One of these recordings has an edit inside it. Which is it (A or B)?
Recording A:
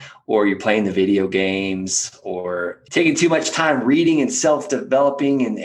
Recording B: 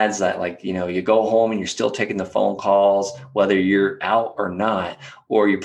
A